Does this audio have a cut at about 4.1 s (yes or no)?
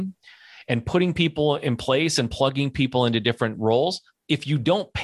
yes